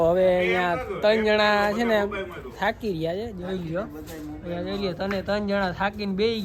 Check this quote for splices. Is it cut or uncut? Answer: uncut